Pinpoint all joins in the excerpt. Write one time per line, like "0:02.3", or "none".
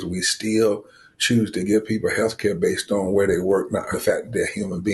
0:03.9